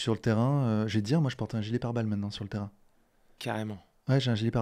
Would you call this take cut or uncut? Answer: uncut